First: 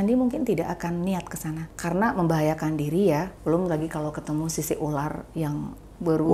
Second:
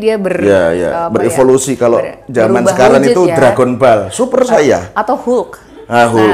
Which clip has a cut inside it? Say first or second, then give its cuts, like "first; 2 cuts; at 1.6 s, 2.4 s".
first; 2 cuts; at 1.7 s, 3.3 s